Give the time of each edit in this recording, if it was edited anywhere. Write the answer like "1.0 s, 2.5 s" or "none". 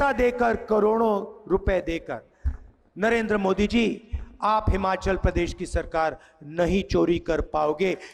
none